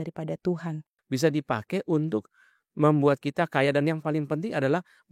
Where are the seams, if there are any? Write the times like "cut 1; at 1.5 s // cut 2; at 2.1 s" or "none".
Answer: cut 1; at 0.9 s